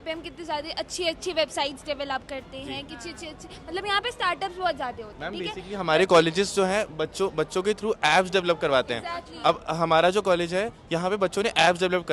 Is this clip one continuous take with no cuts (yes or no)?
yes